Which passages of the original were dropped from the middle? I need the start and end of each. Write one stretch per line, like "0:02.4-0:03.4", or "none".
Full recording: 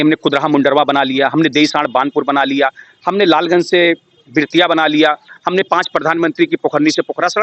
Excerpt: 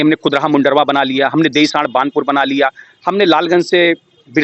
none